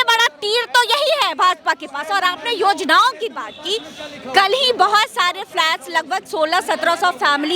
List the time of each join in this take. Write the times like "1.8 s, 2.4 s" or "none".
none